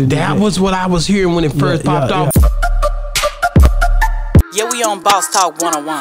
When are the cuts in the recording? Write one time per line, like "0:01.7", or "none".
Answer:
0:02.3